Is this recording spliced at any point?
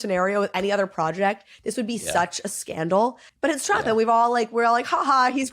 yes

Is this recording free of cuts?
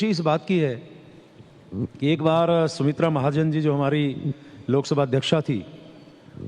no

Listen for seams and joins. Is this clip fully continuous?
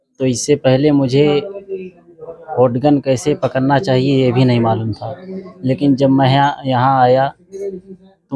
yes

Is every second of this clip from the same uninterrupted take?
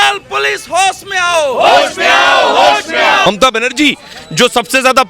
no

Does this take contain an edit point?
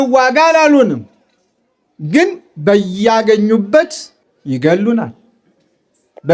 no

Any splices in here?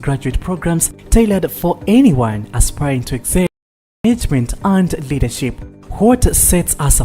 yes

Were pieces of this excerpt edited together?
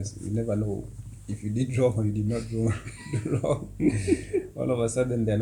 no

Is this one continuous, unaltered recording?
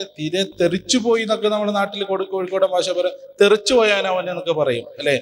yes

